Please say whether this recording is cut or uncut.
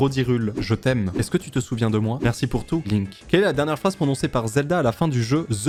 uncut